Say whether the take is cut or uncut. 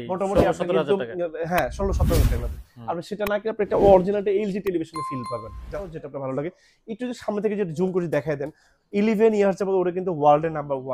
cut